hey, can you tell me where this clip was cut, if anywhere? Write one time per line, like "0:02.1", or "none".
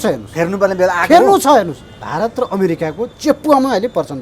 0:02.0